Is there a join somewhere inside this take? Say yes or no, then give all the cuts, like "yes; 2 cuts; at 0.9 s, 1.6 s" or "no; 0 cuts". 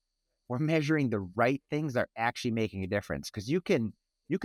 no; 0 cuts